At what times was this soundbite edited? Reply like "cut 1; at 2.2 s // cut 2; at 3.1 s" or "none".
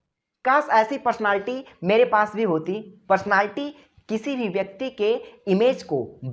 cut 1; at 2.9 s